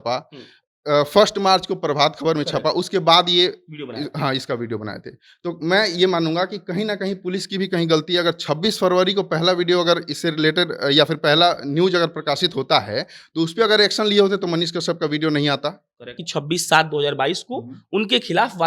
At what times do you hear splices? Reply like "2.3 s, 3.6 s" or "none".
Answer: 16.2 s